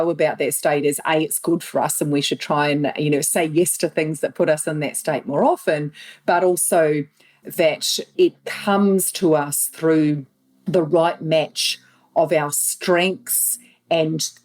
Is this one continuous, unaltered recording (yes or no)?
yes